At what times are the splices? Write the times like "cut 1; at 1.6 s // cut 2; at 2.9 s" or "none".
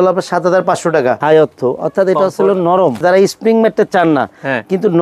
cut 1; at 1.2 s // cut 2; at 3.0 s